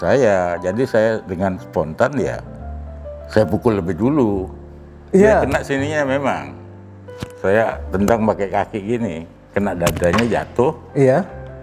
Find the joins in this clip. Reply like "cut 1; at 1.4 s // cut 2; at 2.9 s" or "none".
none